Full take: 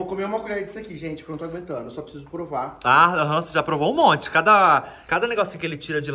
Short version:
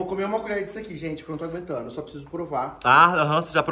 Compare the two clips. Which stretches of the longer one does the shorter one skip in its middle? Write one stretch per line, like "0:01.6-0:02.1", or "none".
none